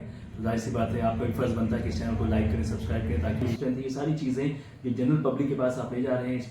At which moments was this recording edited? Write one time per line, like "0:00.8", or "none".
0:03.4